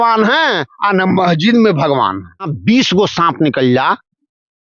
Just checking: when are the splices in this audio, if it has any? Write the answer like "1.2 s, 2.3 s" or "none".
2.5 s